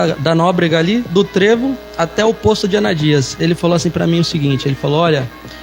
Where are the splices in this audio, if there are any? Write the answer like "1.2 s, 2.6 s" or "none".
none